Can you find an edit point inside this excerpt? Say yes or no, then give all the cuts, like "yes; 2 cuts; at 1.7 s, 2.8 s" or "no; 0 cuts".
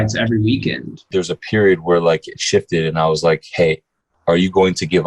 yes; 1 cut; at 1.1 s